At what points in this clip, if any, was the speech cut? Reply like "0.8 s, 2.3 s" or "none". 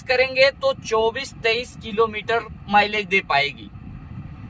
2.6 s